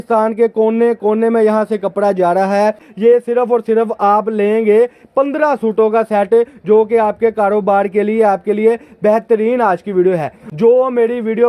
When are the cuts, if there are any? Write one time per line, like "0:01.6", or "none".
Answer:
0:02.9
0:10.4

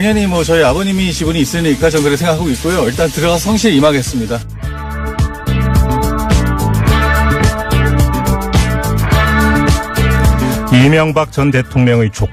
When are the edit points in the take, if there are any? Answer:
none

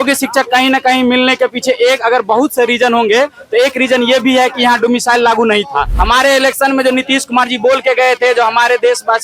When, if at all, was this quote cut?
0:05.9

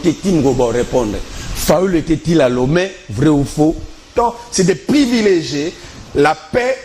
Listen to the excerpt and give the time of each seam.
0:04.1

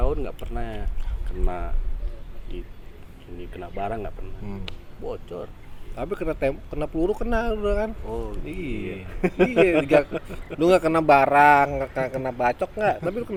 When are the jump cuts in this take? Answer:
none

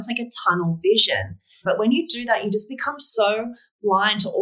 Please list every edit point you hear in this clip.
0:01.6

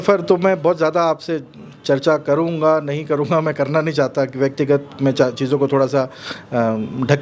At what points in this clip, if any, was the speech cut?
none

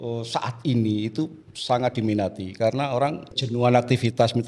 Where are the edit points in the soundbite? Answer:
0:03.4

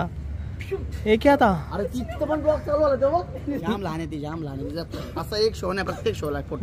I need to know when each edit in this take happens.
0:03.5

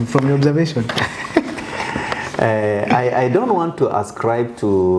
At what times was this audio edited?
none

